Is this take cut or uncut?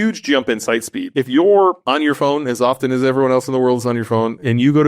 cut